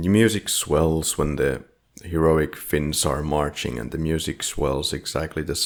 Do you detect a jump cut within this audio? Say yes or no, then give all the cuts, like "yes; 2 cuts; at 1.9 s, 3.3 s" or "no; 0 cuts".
no; 0 cuts